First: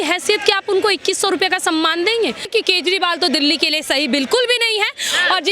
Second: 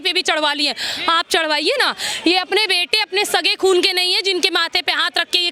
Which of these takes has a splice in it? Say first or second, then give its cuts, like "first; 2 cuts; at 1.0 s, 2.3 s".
first; 1 cut; at 2.4 s